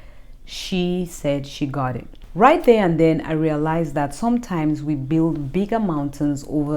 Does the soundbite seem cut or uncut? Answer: cut